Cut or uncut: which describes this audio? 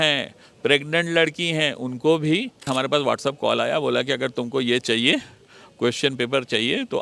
cut